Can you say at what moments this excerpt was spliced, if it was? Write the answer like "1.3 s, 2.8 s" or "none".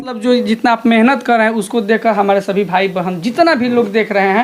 none

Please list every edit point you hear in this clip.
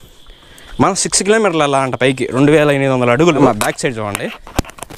3.4 s

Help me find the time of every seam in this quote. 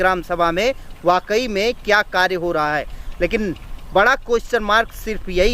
none

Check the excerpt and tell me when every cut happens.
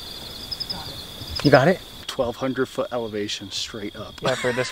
2.1 s

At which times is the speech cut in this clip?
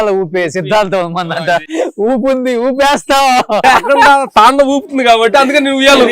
1.6 s, 3.6 s

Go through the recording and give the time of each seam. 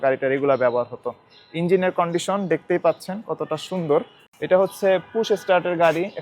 4.2 s

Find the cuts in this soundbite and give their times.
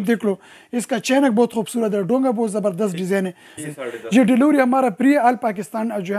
3.4 s

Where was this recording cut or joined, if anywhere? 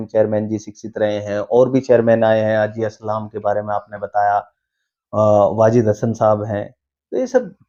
none

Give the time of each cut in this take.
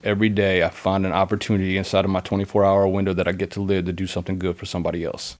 none

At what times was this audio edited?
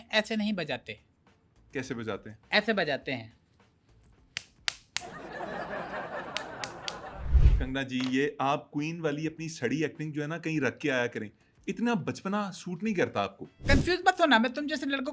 7.6 s, 13.6 s

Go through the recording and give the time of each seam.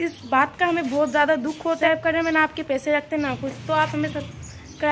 1.8 s

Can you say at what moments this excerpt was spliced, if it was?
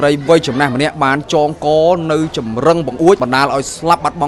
3.2 s

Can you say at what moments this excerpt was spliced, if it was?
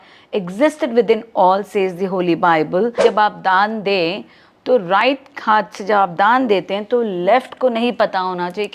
2.9 s

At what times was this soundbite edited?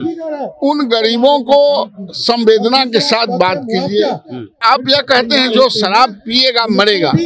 4.6 s

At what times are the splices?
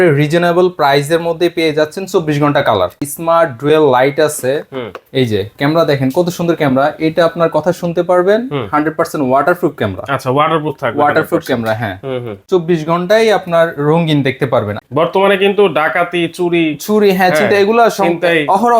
3.0 s, 12.4 s, 14.8 s

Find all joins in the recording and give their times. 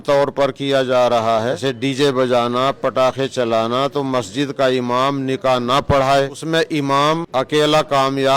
1.6 s, 6.4 s, 7.2 s

